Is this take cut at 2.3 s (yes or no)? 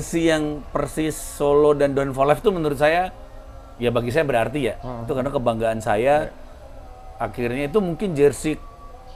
no